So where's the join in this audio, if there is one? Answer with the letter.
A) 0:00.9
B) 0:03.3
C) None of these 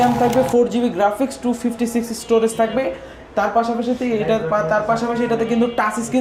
C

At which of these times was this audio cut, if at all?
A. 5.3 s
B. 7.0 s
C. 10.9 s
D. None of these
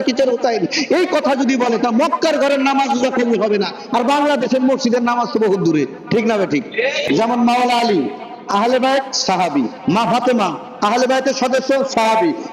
B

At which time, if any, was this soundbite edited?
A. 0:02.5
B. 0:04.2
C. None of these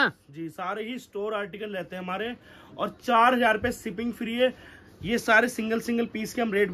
C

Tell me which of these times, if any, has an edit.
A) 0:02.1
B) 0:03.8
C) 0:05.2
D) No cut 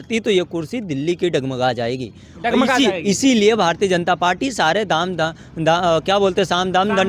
D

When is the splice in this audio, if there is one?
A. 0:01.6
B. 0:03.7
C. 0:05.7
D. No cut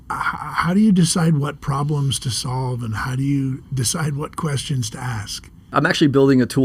C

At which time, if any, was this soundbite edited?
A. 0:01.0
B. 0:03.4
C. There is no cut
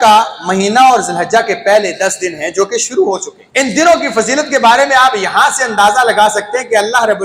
B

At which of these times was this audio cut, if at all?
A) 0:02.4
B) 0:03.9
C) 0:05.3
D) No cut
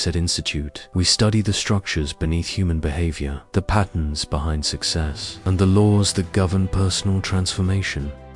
D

